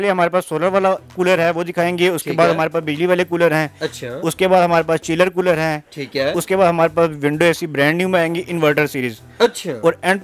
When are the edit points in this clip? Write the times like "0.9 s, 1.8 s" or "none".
none

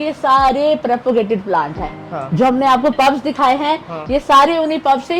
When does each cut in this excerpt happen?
none

